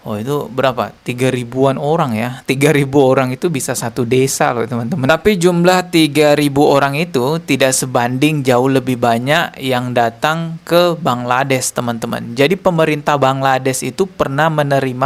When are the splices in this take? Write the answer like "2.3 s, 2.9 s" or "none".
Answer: 5.1 s